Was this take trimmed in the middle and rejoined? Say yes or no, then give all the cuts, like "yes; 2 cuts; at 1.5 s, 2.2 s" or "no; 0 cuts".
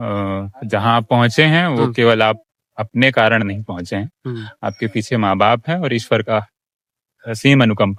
no; 0 cuts